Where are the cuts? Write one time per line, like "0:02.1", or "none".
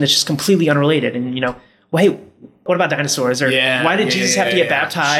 0:02.6